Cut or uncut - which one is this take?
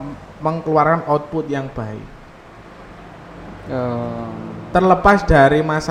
uncut